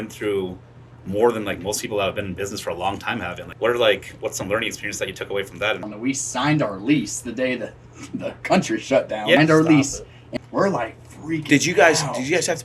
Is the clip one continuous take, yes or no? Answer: no